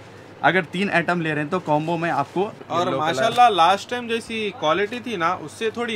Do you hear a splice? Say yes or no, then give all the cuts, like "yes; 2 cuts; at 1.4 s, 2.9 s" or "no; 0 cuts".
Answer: yes; 1 cut; at 2.6 s